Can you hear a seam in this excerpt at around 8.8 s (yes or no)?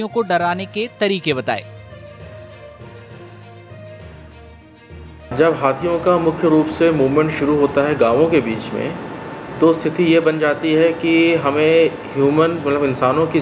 no